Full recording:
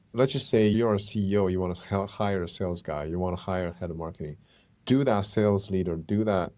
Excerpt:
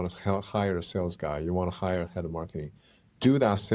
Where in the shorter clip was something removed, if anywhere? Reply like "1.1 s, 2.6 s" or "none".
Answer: none